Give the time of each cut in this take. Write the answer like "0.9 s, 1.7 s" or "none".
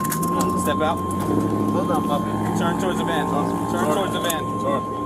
none

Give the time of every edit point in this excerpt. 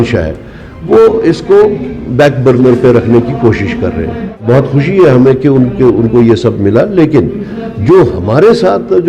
4.4 s

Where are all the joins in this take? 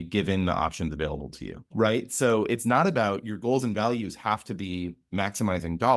1.6 s

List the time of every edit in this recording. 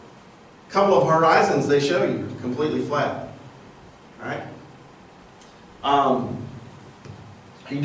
4.4 s

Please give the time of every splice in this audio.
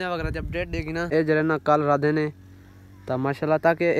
1.1 s

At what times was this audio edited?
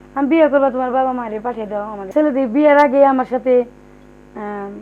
2.0 s

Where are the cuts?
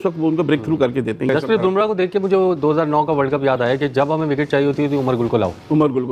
1.3 s

